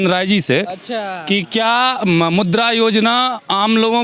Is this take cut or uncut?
uncut